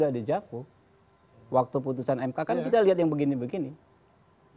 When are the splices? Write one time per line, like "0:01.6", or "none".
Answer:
none